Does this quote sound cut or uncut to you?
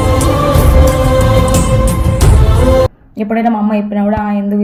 uncut